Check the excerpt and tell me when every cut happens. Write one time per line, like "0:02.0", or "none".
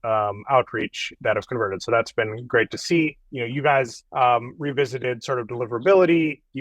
none